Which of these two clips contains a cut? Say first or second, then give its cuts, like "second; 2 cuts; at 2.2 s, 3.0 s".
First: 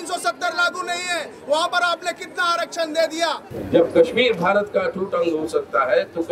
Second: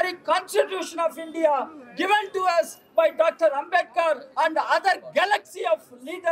first; 1 cut; at 3.5 s